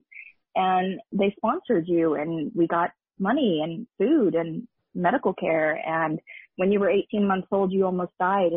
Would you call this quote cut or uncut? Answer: cut